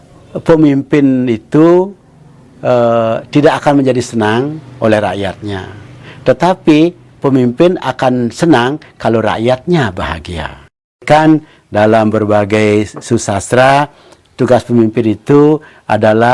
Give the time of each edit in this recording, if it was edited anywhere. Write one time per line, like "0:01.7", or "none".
0:11.0